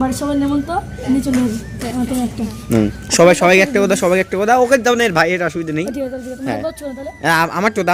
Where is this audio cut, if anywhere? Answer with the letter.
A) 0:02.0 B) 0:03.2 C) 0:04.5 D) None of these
D